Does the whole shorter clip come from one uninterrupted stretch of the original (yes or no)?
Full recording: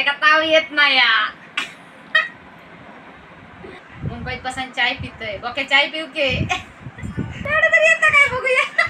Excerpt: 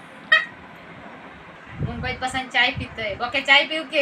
no